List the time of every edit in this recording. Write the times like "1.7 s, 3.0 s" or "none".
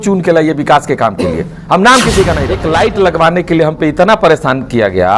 2.6 s